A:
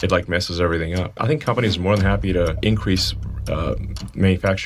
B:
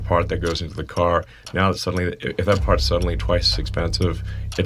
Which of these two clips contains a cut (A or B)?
A